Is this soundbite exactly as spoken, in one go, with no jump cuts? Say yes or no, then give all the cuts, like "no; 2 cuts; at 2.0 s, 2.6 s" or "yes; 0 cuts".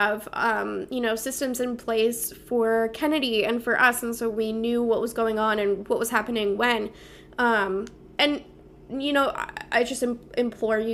yes; 0 cuts